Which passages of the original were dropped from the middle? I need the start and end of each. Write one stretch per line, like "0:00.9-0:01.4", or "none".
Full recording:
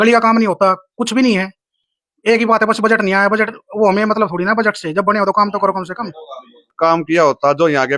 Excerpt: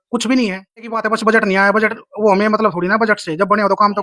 0:01.8-0:02.5